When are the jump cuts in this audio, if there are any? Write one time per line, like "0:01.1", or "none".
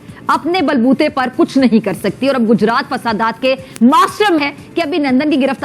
0:04.4